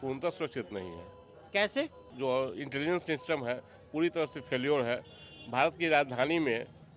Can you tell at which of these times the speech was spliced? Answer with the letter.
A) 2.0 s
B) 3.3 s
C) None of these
A